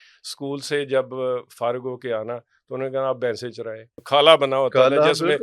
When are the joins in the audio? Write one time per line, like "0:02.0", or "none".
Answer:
0:04.0